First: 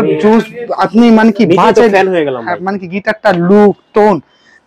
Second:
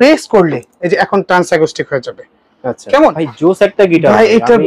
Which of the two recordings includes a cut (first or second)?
second